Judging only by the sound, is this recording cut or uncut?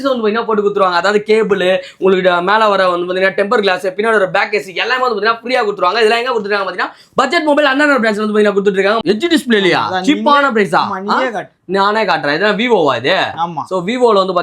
cut